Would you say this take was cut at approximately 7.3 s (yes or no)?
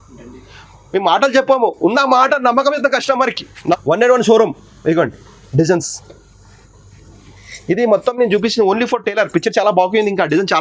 no